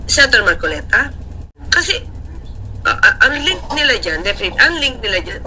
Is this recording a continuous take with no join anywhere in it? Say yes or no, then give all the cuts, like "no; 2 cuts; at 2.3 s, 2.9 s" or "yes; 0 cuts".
no; 1 cut; at 1.6 s